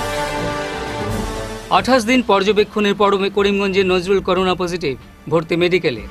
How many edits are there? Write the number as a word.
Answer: one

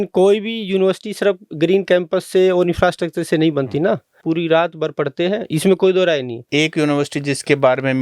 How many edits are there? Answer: two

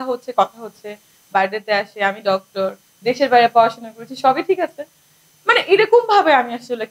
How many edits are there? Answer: zero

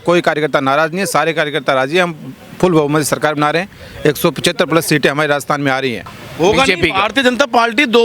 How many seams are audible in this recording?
one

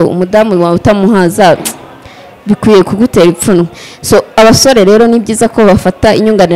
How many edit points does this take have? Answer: zero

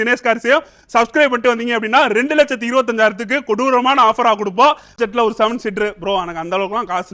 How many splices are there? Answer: one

